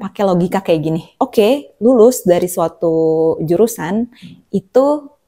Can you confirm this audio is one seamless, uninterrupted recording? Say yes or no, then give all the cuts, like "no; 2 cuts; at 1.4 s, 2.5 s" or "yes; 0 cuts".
no; 1 cut; at 1.0 s